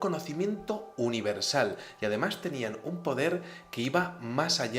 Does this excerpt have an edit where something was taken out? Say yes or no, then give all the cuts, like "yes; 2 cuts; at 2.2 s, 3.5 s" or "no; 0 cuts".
no; 0 cuts